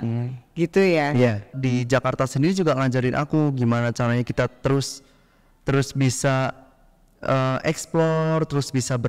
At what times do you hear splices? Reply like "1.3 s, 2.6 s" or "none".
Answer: 1.5 s